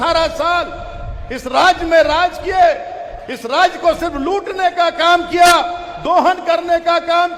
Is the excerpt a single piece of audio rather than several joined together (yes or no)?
yes